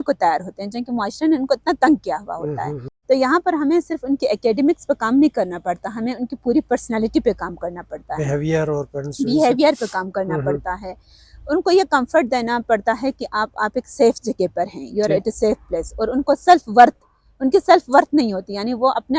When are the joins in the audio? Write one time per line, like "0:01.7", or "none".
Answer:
0:02.9